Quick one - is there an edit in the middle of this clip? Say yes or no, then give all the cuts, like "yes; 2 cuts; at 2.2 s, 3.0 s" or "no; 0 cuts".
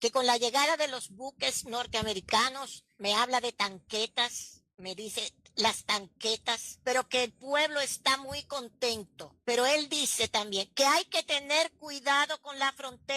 yes; 1 cut; at 9.6 s